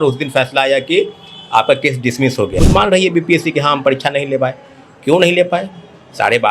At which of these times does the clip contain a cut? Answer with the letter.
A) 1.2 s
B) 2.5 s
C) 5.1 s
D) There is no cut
B